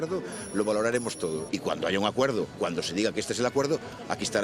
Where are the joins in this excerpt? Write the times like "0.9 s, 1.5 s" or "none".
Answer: 1.5 s